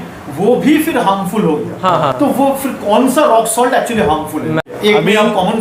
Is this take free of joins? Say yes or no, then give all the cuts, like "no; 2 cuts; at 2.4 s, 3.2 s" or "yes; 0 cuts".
no; 2 cuts; at 2.1 s, 4.3 s